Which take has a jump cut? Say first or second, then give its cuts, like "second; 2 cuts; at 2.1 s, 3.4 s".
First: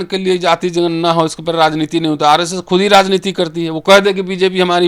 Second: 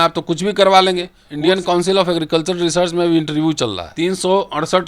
second; 2 cuts; at 1.2 s, 3.8 s